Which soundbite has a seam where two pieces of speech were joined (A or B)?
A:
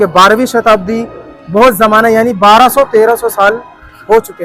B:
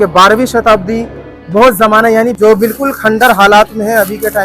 B